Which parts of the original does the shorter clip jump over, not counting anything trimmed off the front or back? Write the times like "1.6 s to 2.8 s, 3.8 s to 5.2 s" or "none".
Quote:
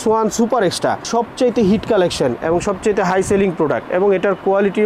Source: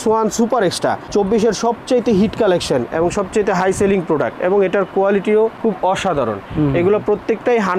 1.1 s to 1.6 s